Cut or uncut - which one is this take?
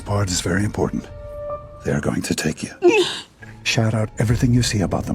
cut